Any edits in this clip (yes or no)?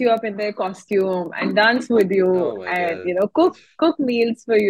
no